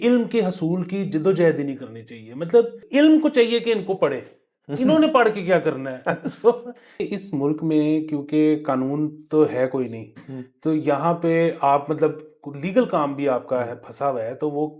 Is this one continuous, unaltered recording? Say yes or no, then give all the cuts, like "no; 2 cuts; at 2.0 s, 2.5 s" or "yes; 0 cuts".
no; 2 cuts; at 2.8 s, 6.9 s